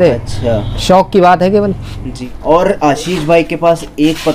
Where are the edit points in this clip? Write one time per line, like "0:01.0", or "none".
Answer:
0:02.3